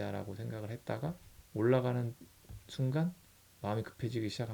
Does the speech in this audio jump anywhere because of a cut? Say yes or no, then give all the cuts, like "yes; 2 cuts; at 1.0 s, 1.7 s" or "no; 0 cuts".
yes; 1 cut; at 1.3 s